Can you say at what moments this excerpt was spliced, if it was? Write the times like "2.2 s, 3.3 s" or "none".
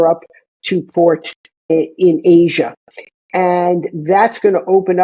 1.7 s